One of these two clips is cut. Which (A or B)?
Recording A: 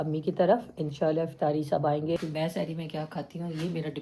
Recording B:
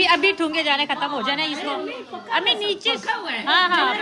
A